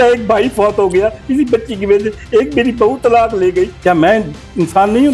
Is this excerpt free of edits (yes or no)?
no